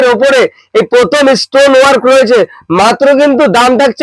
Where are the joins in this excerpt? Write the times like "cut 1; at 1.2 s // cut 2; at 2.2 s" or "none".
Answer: none